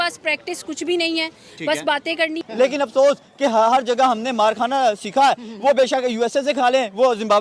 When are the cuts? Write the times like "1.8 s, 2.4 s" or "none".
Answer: 2.4 s